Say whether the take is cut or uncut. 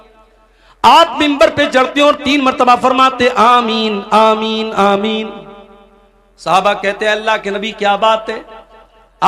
uncut